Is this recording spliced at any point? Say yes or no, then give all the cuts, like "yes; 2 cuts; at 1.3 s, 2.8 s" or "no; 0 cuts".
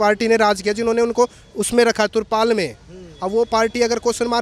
no; 0 cuts